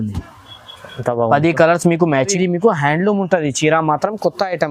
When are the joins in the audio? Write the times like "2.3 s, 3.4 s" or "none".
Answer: 2.3 s